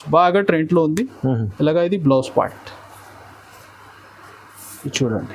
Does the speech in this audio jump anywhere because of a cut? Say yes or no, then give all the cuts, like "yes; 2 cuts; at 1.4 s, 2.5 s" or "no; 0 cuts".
no; 0 cuts